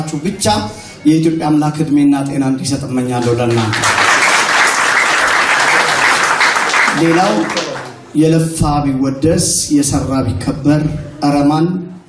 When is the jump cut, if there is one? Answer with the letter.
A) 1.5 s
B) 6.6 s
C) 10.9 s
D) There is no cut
A